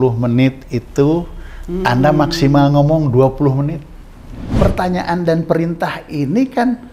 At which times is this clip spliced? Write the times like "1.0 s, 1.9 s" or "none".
4.4 s